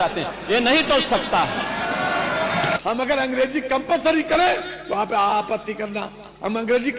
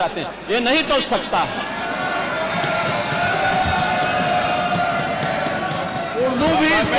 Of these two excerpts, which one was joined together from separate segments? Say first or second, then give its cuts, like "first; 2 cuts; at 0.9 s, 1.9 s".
first; 1 cut; at 2.8 s